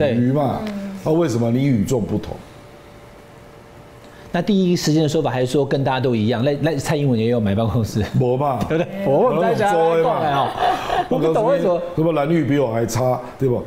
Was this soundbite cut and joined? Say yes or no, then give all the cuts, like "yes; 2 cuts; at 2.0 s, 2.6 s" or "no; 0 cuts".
no; 0 cuts